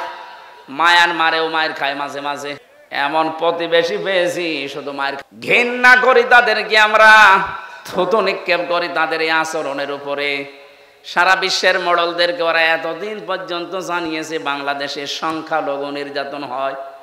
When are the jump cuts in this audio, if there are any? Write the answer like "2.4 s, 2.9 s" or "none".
2.7 s, 5.2 s